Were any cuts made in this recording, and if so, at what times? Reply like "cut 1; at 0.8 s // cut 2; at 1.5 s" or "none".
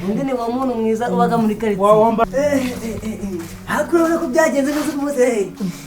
cut 1; at 2.2 s